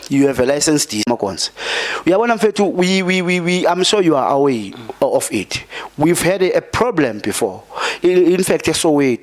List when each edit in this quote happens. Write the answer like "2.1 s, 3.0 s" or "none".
1.1 s